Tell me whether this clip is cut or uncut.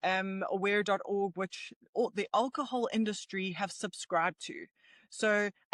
uncut